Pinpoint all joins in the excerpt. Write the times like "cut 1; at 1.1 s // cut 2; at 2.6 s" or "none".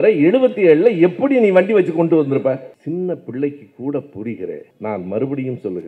none